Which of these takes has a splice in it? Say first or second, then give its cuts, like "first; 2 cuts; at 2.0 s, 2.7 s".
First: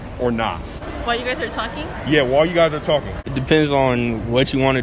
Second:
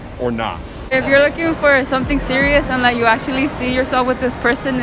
second; 1 cut; at 0.9 s